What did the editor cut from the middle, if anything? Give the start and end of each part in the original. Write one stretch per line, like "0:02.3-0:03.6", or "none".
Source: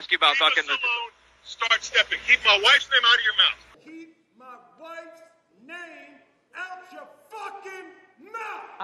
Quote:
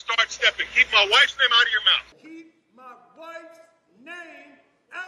0:03.6-0:03.7